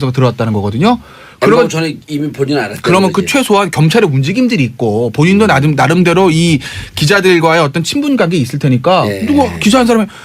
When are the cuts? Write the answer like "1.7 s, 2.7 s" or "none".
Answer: 2.0 s